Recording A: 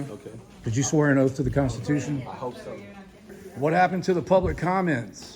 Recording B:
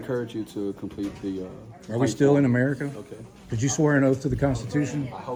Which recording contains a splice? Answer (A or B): A